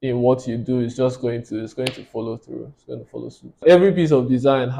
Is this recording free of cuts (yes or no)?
no